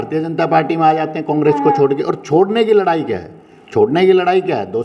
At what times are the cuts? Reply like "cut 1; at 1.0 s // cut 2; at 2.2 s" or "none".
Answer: none